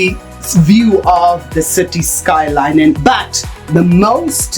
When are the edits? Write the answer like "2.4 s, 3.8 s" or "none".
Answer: 3.0 s